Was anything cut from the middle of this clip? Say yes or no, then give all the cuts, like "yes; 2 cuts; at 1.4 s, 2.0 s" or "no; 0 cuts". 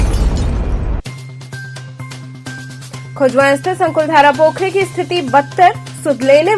yes; 1 cut; at 2.6 s